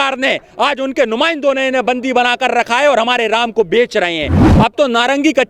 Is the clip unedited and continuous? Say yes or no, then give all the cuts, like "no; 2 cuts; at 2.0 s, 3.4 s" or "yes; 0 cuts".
no; 1 cut; at 4.4 s